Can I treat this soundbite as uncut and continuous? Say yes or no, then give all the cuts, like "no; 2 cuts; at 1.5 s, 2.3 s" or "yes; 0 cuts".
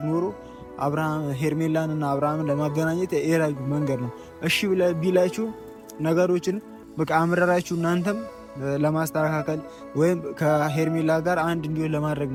yes; 0 cuts